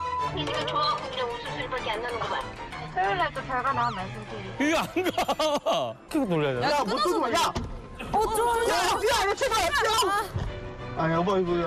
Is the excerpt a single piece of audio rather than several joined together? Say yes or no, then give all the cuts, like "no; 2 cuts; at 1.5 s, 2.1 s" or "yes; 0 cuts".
no; 1 cut; at 6.1 s